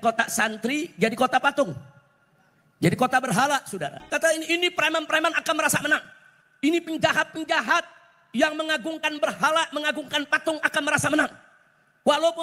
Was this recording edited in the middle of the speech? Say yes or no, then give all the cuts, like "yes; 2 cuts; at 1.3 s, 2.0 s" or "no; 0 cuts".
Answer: yes; 1 cut; at 4.0 s